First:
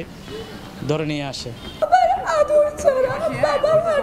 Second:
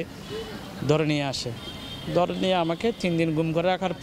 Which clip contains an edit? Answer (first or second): first